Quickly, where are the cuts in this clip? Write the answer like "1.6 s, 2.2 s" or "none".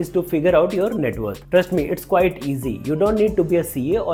none